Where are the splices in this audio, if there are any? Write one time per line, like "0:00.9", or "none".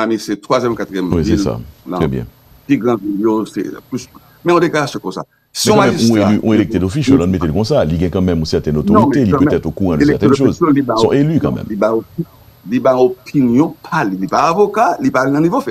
none